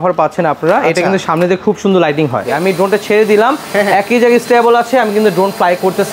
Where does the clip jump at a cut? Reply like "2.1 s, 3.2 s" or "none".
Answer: 2.4 s